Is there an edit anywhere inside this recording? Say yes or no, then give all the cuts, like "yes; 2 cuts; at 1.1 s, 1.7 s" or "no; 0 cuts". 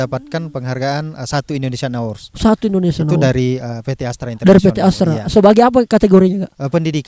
no; 0 cuts